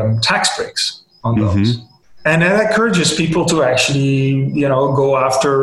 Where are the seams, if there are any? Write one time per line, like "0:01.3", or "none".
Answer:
none